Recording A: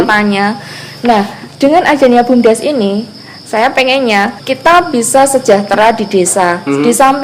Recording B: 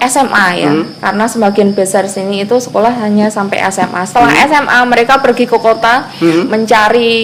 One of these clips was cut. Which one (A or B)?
A